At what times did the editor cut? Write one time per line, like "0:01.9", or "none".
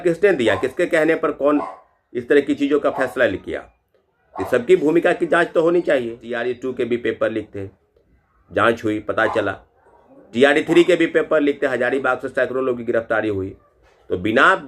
0:06.3